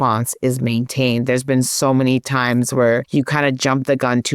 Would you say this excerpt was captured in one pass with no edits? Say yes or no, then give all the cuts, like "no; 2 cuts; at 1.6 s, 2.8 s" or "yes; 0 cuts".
no; 1 cut; at 3.1 s